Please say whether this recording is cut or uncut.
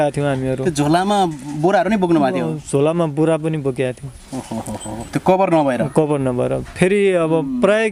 uncut